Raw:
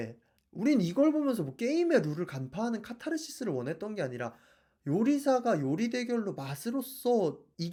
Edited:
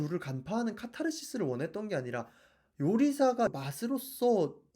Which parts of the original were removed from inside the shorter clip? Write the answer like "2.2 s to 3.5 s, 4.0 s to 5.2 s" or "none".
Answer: 5.6 s to 6.3 s